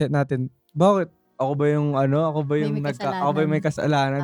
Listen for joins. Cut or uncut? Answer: uncut